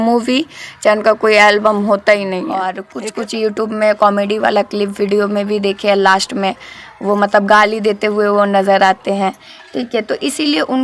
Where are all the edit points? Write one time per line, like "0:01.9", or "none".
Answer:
0:02.8